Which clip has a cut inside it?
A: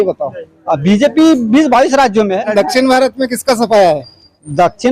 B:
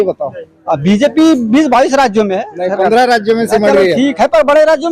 A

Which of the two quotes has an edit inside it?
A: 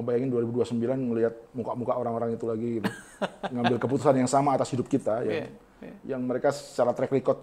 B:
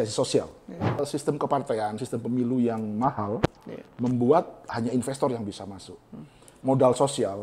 B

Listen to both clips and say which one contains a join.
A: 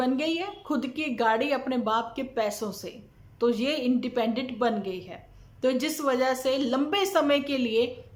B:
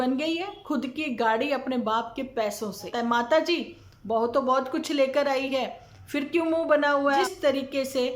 B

